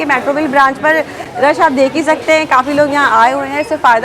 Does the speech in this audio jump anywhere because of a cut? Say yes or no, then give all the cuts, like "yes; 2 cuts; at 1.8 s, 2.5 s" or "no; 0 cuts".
no; 0 cuts